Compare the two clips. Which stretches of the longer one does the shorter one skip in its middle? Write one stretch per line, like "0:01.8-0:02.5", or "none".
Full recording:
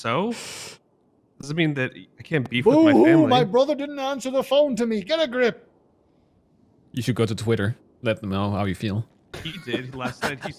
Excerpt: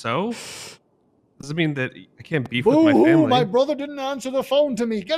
none